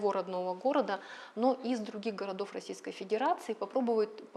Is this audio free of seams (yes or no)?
yes